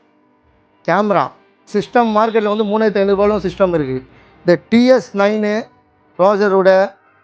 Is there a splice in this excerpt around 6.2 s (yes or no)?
no